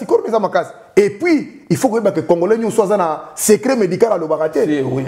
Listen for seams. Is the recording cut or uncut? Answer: uncut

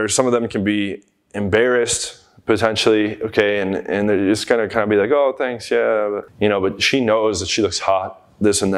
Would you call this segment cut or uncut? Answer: uncut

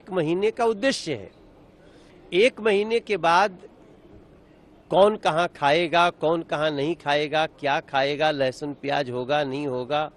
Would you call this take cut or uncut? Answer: uncut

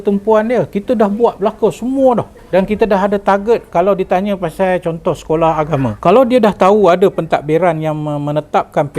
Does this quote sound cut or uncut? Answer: cut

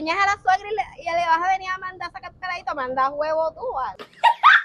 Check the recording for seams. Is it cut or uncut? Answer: uncut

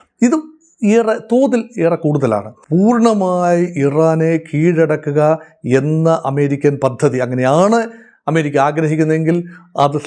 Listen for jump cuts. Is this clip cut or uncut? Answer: cut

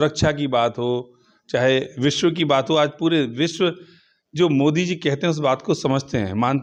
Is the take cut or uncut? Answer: uncut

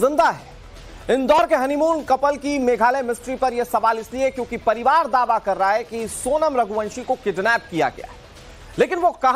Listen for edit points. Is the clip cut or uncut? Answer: cut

